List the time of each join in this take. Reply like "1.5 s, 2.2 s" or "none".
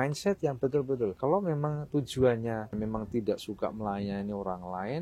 1.2 s, 2.7 s